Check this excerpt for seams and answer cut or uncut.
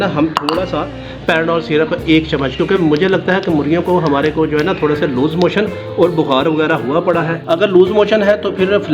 uncut